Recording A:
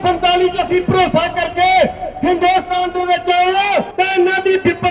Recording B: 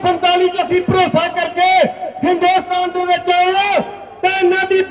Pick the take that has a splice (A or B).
A